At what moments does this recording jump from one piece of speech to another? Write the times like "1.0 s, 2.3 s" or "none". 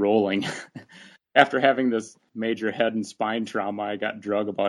1.2 s, 2.2 s